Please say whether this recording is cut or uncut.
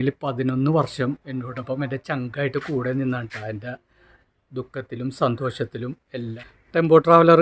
cut